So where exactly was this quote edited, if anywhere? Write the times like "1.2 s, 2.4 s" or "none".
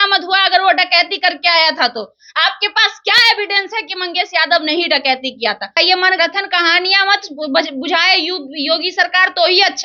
5.7 s